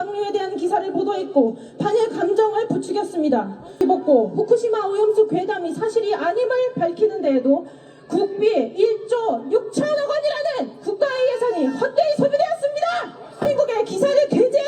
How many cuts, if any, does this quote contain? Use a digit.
2